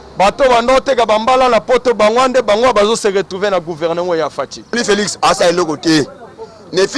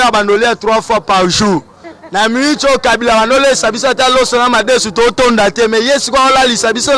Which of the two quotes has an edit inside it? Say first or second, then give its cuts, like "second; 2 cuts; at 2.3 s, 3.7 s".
first; 1 cut; at 4.7 s